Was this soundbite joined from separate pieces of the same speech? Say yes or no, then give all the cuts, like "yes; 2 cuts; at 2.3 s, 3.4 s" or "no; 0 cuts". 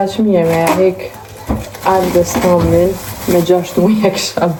no; 0 cuts